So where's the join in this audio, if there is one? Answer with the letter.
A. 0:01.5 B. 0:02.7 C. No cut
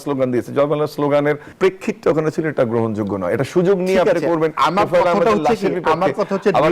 A